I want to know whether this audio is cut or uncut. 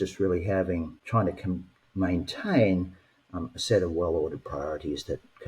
cut